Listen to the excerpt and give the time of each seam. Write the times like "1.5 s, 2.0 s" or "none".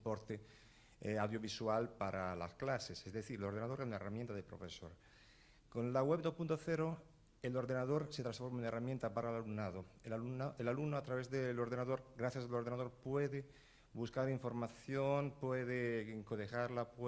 none